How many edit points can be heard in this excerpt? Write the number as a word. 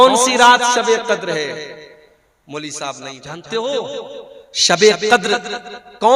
one